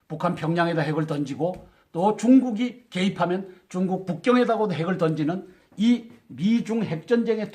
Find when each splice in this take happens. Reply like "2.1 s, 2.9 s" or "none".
1.9 s

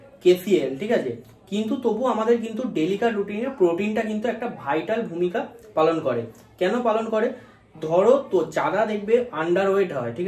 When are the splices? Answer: none

